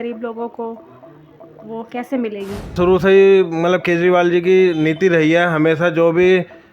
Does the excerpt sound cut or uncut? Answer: cut